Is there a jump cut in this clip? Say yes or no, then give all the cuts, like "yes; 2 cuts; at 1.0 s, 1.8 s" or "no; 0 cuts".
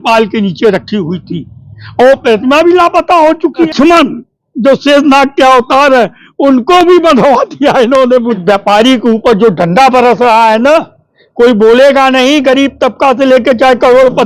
yes; 2 cuts; at 3.7 s, 8.4 s